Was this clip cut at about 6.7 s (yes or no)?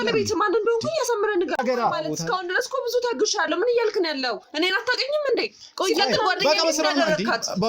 no